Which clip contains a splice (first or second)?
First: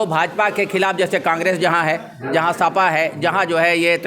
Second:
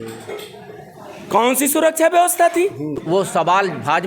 second